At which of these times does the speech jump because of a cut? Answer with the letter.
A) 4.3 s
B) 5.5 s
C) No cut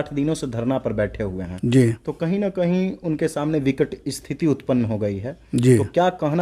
C